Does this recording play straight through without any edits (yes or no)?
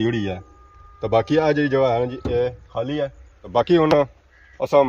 no